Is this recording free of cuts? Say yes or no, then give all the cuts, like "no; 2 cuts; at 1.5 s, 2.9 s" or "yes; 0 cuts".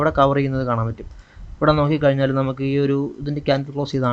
yes; 0 cuts